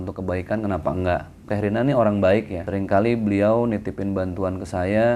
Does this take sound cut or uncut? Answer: cut